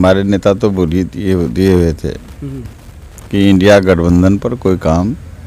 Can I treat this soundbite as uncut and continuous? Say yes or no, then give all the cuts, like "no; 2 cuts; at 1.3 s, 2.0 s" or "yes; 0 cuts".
yes; 0 cuts